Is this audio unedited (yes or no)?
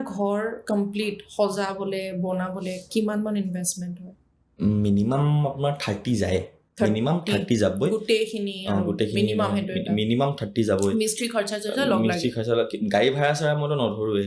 yes